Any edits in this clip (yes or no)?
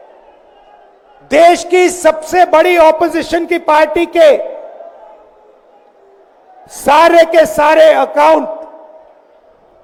no